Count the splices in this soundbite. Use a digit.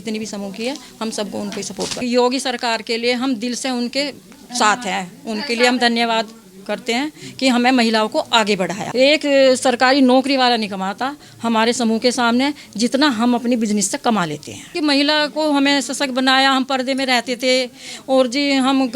3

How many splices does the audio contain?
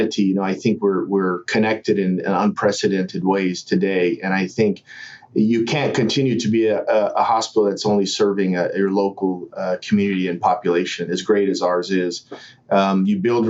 0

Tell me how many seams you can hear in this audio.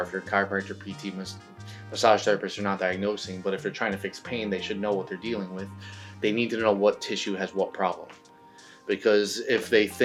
0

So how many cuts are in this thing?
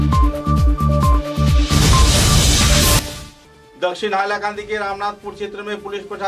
1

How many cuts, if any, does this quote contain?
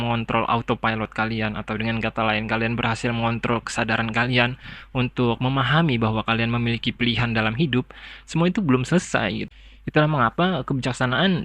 1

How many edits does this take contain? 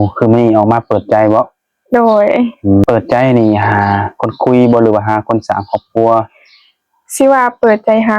1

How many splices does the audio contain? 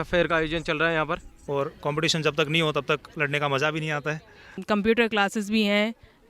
2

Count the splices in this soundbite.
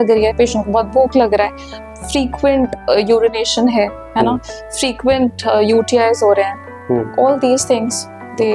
0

